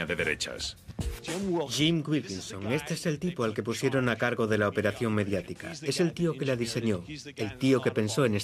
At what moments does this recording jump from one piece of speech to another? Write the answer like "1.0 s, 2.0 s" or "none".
3.8 s

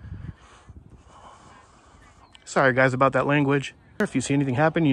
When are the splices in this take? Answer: 4.0 s

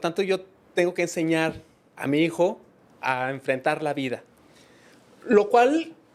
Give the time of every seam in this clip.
none

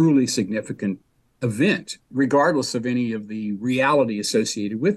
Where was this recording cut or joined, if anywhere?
2.0 s

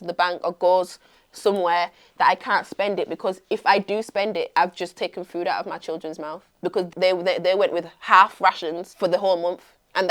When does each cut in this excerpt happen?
6.9 s, 8.8 s

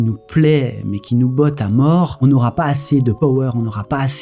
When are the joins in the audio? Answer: 2.1 s, 3.2 s

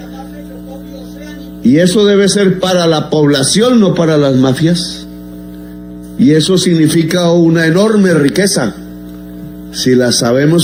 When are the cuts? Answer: none

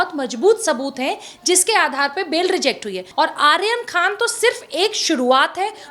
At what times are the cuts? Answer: 3.0 s

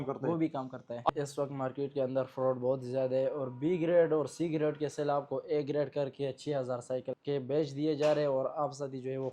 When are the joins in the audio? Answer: 1.1 s, 7.1 s

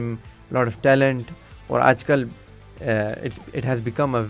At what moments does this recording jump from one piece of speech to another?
none

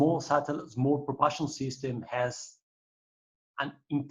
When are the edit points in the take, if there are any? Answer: none

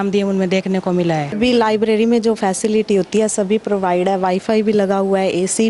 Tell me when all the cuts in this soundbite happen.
1.4 s

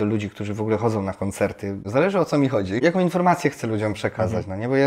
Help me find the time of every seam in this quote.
1.8 s, 2.8 s

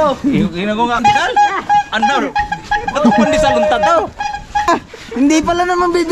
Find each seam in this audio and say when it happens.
1.0 s, 4.7 s

